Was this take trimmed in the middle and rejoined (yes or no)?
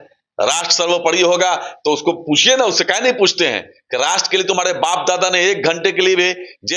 no